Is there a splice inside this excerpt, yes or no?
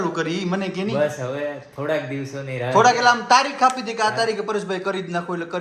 no